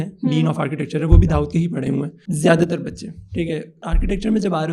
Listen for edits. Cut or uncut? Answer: cut